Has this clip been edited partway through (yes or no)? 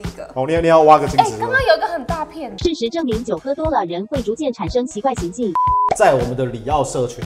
yes